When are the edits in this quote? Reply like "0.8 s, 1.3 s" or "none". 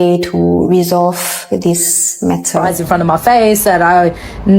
2.6 s